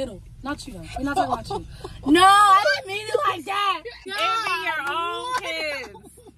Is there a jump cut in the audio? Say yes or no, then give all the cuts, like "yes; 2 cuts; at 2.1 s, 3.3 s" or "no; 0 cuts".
yes; 1 cut; at 4.1 s